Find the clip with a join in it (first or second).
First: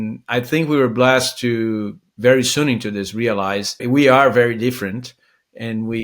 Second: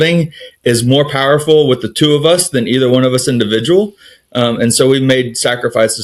first